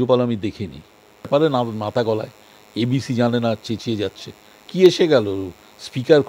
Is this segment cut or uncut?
cut